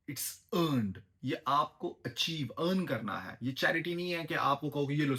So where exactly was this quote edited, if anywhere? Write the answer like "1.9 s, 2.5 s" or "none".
none